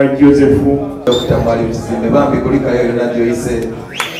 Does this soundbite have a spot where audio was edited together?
yes; 1 cut; at 1.0 s

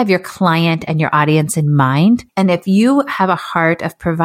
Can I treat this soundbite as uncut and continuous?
no; 1 cut; at 2.3 s

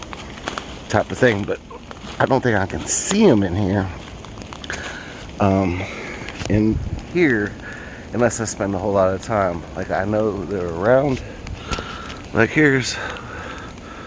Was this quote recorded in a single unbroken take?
yes; 0 cuts

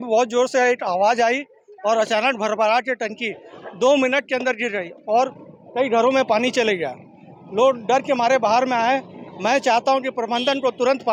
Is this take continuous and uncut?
yes; 0 cuts

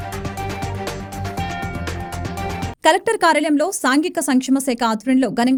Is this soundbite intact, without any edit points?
yes; 0 cuts

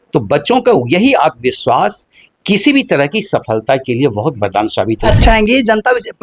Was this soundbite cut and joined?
yes; 1 cut; at 5.1 s

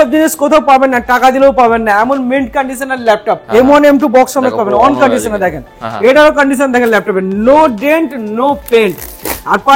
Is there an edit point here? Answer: yes; 1 cut; at 3.4 s

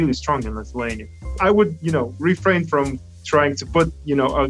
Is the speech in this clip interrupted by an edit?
yes; 1 cut; at 1.4 s

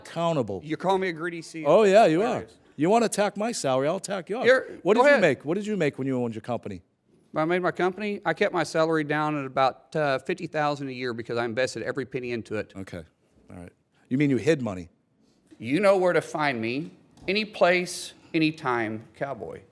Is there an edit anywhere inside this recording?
yes; 1 cut; at 15.4 s

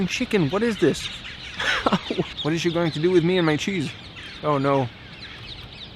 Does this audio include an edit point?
yes; 1 cut; at 2.3 s

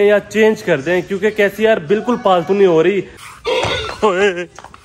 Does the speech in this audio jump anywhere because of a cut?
yes; 1 cut; at 3.1 s

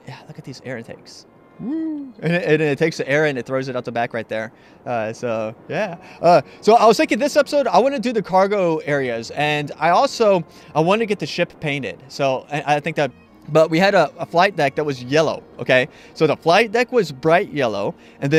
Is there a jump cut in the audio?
no; 0 cuts

